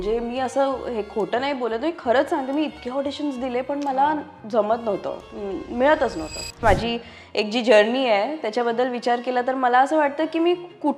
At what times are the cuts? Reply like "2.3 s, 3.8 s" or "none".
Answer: 6.6 s